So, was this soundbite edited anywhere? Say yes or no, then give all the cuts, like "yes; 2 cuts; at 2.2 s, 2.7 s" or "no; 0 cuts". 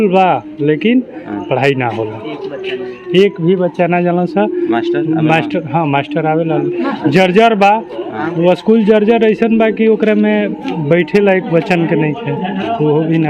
no; 0 cuts